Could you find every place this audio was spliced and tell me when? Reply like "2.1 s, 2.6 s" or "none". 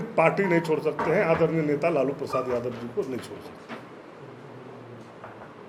none